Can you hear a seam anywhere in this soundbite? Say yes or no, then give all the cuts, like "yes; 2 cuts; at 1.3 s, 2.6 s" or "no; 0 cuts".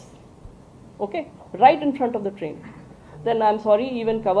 no; 0 cuts